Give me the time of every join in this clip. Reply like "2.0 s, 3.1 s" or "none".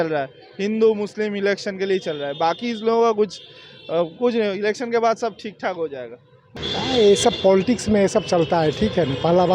none